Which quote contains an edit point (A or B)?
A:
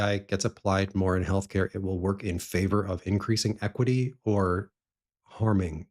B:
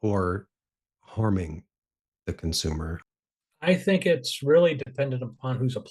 B